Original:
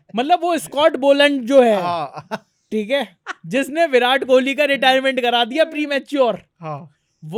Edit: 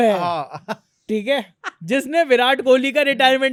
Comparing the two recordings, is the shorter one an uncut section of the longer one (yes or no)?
yes